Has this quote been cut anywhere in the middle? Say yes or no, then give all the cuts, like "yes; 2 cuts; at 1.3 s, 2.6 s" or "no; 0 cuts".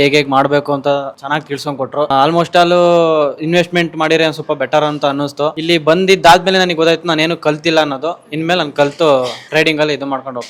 no; 0 cuts